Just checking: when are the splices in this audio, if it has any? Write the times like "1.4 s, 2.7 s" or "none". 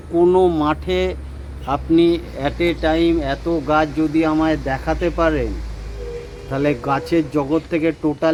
none